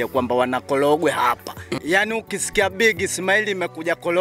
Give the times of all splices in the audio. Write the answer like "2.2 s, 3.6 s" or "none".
1.8 s